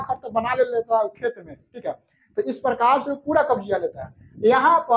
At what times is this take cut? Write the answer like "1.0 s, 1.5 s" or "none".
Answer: none